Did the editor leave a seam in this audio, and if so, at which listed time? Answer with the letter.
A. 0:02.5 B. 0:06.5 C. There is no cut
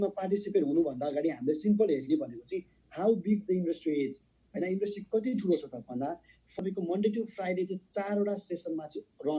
B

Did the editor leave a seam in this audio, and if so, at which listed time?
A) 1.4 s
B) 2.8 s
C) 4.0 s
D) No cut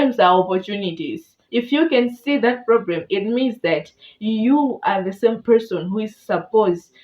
A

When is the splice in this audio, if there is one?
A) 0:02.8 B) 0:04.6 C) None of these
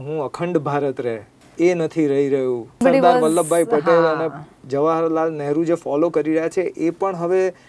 A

